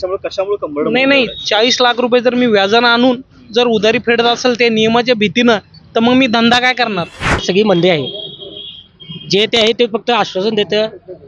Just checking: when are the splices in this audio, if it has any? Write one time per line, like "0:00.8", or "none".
0:07.4

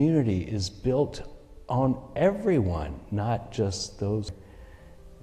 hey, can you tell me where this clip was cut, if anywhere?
0:04.3

